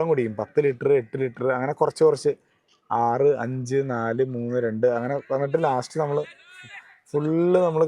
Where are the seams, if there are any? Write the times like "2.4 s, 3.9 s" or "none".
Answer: none